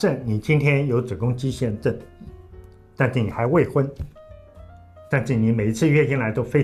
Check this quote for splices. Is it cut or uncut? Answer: uncut